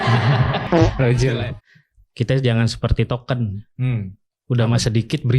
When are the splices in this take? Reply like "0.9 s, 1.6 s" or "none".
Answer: 1.5 s